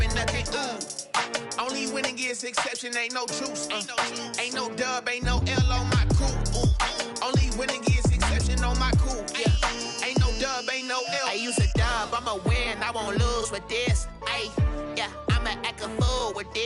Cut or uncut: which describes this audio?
cut